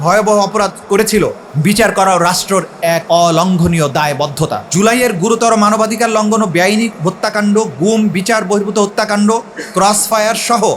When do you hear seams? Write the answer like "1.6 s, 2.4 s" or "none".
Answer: 1.4 s, 3.0 s, 4.7 s